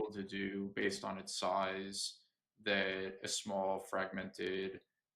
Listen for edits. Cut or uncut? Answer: uncut